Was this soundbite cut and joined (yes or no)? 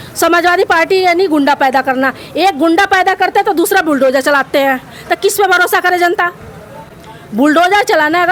no